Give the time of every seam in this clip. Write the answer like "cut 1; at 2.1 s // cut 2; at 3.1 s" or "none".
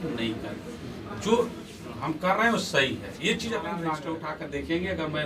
cut 1; at 4.2 s